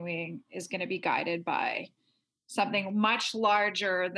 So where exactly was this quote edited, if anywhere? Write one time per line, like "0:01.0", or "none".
none

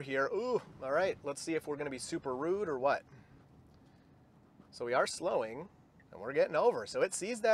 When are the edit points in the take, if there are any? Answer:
none

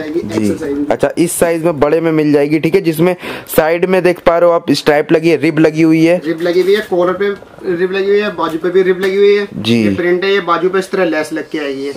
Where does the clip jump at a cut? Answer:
none

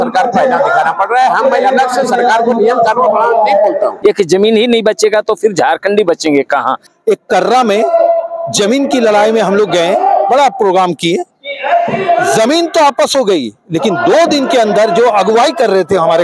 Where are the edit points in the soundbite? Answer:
0:03.9
0:06.9

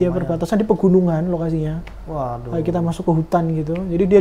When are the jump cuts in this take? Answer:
none

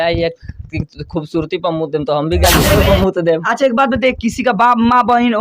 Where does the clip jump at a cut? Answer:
0:02.6

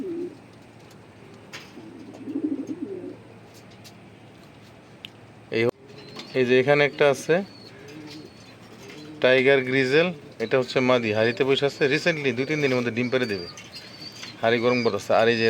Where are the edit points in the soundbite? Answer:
0:05.7

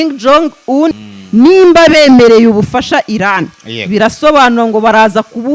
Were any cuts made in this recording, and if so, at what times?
0:00.9

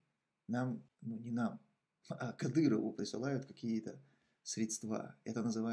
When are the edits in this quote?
0:00.9

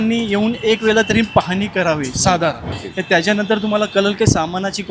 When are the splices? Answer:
0:02.7

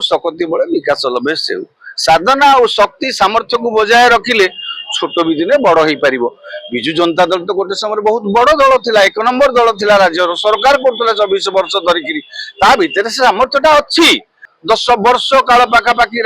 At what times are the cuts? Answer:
0:14.5

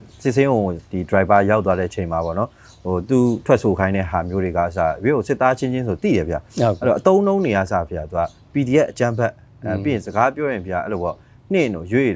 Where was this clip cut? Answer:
none

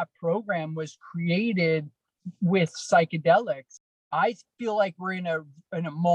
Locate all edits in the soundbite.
0:03.7

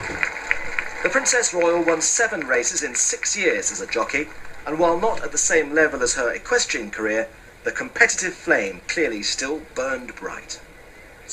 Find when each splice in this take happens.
0:06.7

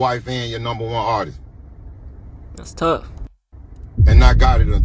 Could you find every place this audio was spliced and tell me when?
none

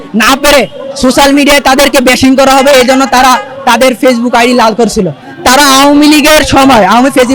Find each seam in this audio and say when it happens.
0:05.2

